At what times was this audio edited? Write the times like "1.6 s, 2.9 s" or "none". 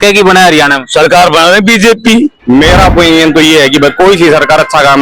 2.4 s